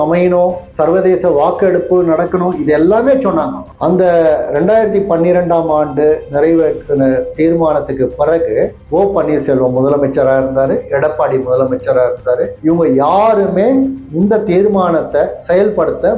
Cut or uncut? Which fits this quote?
cut